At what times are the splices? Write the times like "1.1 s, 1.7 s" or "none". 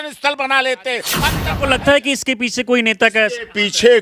1.0 s